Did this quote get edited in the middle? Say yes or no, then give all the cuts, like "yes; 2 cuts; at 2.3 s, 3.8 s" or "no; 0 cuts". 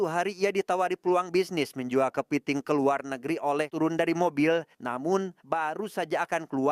yes; 1 cut; at 3.7 s